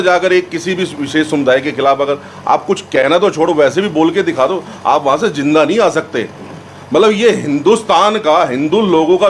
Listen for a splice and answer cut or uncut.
uncut